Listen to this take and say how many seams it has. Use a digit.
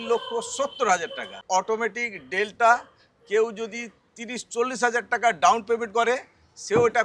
1